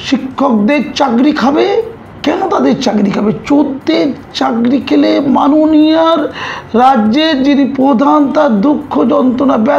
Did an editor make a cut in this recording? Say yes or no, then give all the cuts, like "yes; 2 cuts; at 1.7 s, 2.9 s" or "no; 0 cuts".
no; 0 cuts